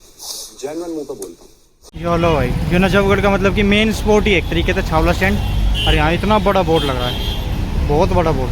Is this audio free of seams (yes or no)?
no